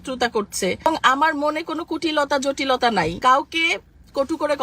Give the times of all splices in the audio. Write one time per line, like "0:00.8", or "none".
0:00.9
0:03.2